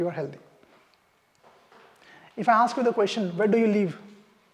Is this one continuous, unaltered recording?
no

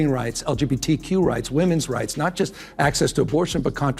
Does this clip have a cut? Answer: no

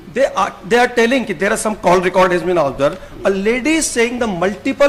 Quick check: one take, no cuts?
yes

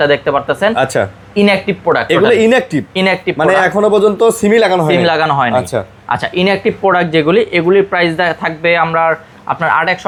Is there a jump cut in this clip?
no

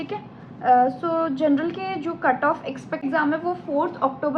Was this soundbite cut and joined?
yes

